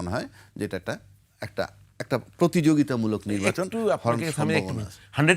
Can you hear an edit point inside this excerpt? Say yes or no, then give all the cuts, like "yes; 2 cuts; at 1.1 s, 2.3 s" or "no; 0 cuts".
no; 0 cuts